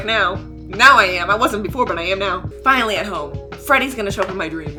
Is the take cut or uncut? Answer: uncut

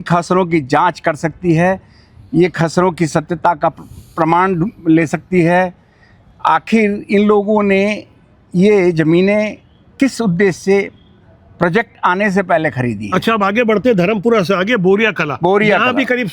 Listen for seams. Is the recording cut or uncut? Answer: uncut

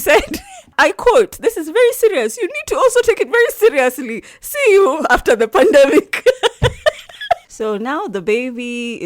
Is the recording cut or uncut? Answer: cut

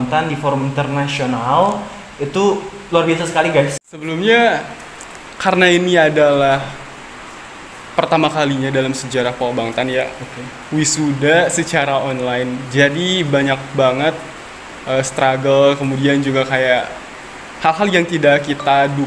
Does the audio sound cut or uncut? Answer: cut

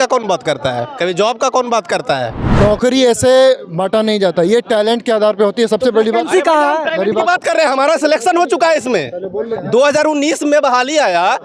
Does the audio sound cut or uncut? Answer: cut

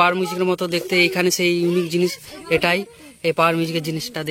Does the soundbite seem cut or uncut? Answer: uncut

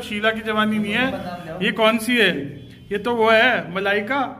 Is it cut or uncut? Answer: uncut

